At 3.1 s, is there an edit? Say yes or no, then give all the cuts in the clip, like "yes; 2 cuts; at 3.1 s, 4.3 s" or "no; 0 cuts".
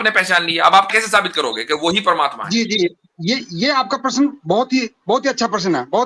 no; 1 cut; at 0.9 s